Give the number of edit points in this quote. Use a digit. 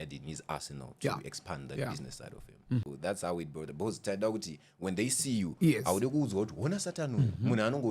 1